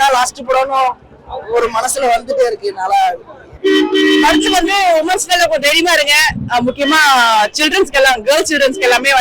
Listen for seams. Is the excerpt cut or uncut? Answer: uncut